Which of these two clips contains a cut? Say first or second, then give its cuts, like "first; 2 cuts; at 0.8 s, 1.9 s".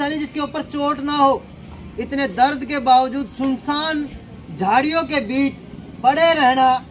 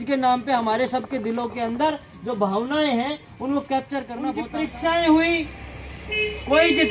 second; 1 cut; at 4.4 s